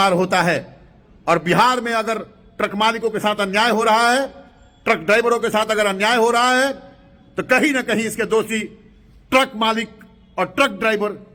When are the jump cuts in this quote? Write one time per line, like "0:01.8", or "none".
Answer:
none